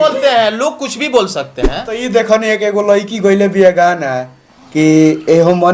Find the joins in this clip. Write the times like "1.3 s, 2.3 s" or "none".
1.9 s